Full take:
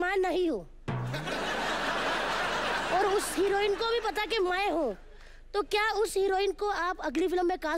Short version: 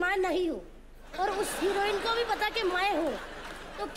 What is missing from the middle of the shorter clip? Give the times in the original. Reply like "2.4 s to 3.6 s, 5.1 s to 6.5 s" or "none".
1.1 s to 2.9 s